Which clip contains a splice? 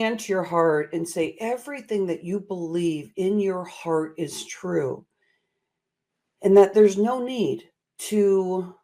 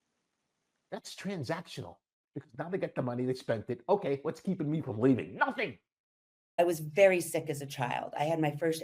second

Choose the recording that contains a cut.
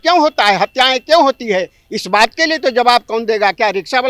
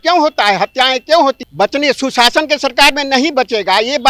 second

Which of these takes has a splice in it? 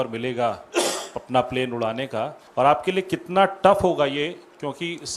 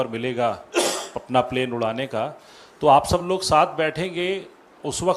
first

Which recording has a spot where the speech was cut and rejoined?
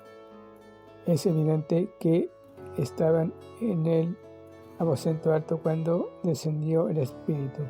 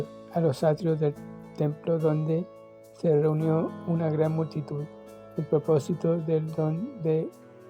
first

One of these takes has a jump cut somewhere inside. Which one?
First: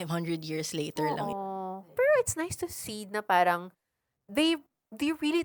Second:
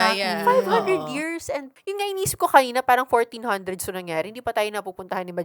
second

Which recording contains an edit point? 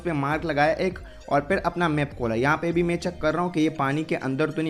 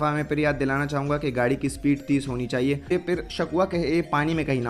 second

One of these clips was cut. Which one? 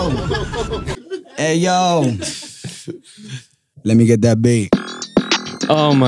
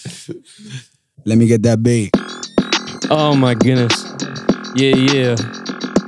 first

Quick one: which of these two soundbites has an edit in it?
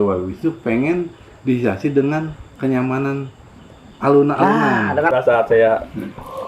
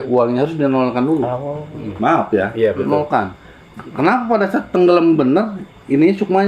first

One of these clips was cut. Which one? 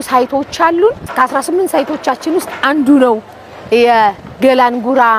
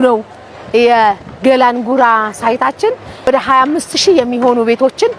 second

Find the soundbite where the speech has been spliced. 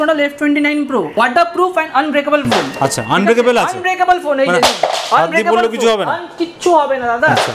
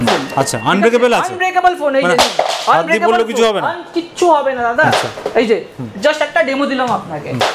first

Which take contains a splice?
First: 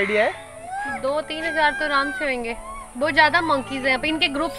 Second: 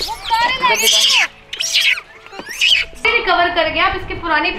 second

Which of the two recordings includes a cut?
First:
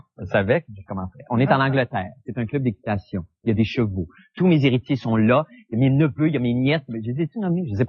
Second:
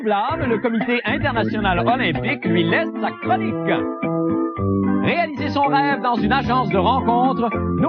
first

